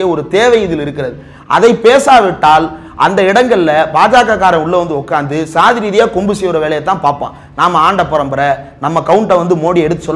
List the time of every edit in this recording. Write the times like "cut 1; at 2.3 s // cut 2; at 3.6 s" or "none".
none

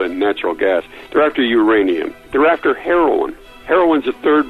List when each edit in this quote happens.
cut 1; at 2.3 s

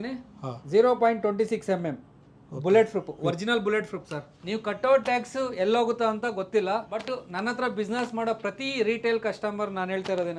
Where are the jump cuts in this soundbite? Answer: cut 1; at 4.4 s // cut 2; at 7.1 s

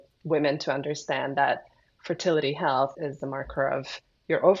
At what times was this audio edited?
cut 1; at 2.9 s

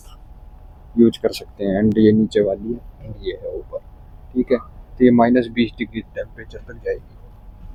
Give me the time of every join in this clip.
none

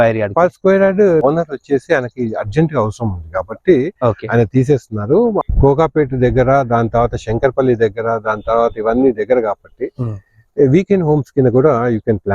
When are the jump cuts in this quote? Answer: cut 1; at 1.2 s // cut 2; at 5.4 s

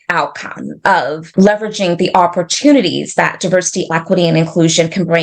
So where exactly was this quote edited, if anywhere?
cut 1; at 1.2 s

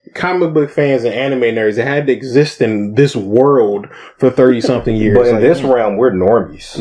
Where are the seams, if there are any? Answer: none

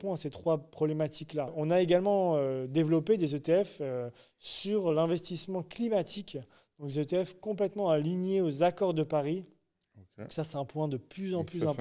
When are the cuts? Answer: cut 1; at 1.6 s

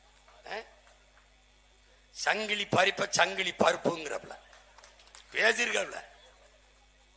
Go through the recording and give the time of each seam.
none

